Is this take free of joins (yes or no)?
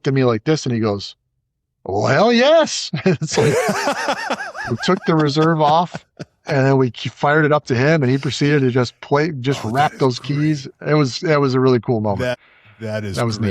no